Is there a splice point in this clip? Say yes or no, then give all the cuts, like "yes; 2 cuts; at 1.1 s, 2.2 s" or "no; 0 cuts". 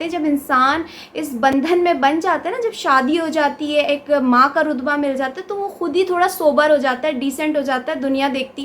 no; 0 cuts